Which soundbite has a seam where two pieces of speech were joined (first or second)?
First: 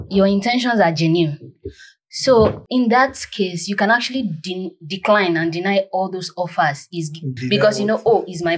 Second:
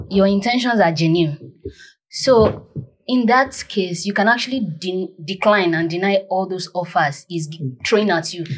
first